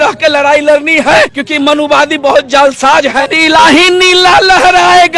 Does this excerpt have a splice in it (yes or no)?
yes